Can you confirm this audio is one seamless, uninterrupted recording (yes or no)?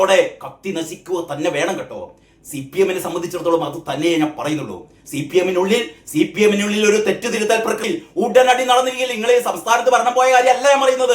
no